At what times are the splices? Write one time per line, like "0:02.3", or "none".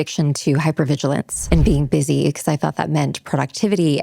0:01.3